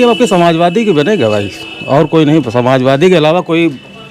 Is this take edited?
no; 0 cuts

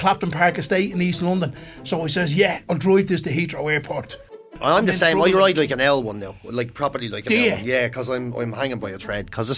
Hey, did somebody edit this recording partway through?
yes; 2 cuts; at 2.6 s, 4.2 s

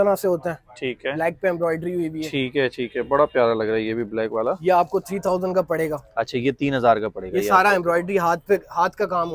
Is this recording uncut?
yes; 0 cuts

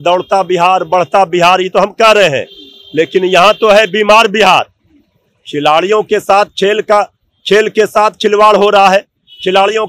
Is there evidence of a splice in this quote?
no; 0 cuts

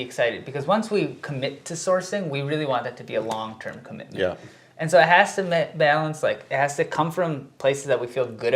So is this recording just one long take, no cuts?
yes; 0 cuts

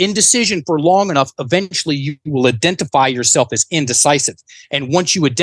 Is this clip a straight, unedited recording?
yes; 0 cuts

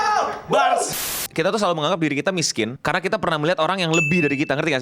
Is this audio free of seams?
no; 2 cuts; at 1.0 s, 2.8 s

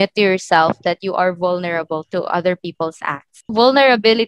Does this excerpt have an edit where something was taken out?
no; 0 cuts

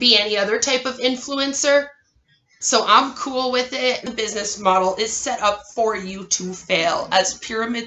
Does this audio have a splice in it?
yes; 1 cut; at 4.1 s

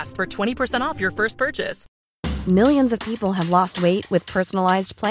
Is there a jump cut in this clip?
yes; 1 cut; at 1.8 s

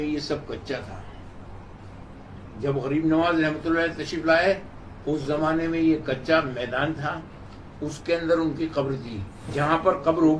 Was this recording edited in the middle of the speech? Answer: yes; 1 cut; at 9.5 s

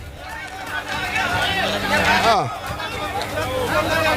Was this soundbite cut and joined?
yes; 1 cut; at 2.3 s

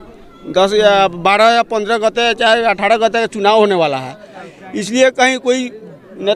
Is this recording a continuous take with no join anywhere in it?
yes; 0 cuts

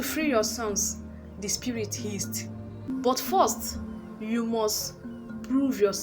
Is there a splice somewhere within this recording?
yes; 1 cut; at 2.9 s

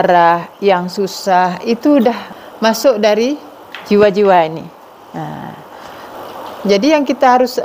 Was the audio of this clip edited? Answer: yes; 2 cuts; at 2.3 s, 6.1 s

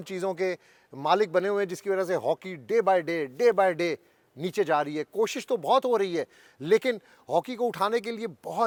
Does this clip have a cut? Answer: no; 0 cuts

